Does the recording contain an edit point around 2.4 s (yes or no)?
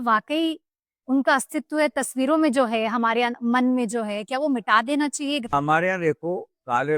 no